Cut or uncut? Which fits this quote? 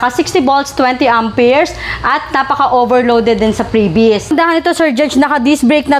cut